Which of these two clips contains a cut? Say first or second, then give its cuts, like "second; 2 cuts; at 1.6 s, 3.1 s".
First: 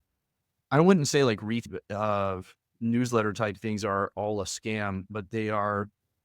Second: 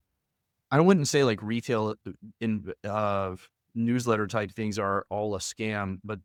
first; 1 cut; at 1.7 s